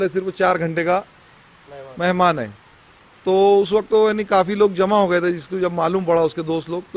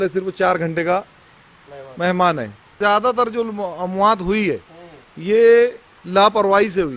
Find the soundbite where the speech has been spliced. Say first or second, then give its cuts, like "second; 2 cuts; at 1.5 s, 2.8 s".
second; 1 cut; at 2.7 s